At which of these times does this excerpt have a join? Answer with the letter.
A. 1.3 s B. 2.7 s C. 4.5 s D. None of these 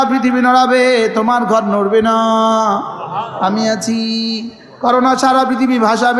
D